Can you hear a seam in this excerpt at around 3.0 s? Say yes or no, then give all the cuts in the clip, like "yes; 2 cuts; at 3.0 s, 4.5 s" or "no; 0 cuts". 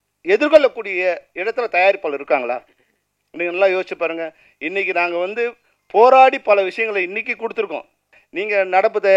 no; 1 cut; at 8.1 s